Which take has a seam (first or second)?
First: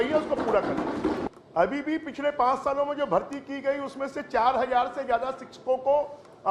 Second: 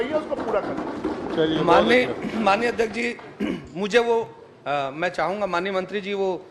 first